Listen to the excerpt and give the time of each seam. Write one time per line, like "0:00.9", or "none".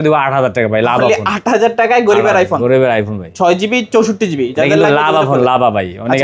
none